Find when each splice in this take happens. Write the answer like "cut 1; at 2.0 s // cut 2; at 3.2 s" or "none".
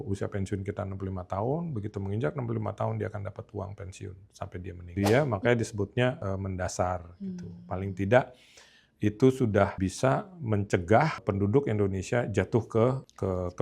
cut 1; at 4.8 s // cut 2; at 9.7 s